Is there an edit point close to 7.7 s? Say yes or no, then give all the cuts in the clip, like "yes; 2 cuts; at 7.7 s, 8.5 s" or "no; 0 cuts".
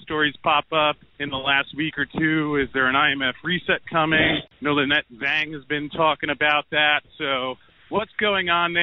yes; 3 cuts; at 1.1 s, 4.4 s, 7.7 s